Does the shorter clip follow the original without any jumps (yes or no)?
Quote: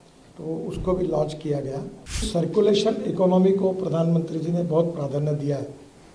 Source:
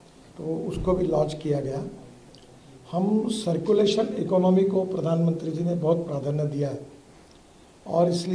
no